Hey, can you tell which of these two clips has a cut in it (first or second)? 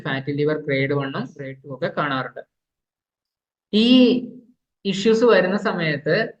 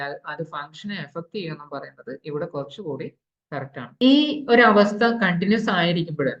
second